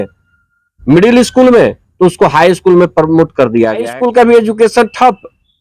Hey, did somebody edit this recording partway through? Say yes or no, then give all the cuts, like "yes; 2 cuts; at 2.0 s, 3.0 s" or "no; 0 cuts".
yes; 1 cut; at 3.8 s